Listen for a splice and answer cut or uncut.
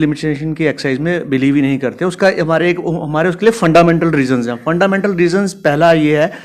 uncut